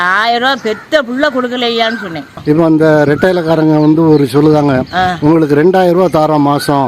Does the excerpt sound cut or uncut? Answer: cut